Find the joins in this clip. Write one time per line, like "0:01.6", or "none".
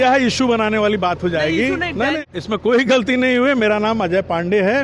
0:02.2